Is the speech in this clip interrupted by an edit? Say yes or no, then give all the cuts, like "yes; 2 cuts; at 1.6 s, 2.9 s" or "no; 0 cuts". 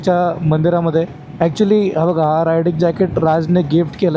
yes; 1 cut; at 1.2 s